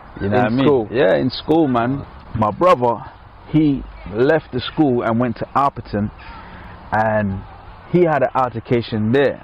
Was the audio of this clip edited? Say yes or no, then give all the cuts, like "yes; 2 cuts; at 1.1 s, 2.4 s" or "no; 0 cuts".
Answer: yes; 1 cut; at 2.0 s